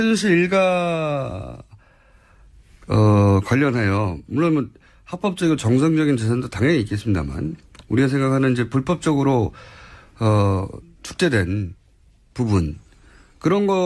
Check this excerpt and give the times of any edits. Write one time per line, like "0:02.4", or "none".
0:06.7